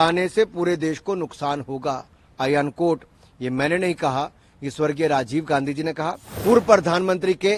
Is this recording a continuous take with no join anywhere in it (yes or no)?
no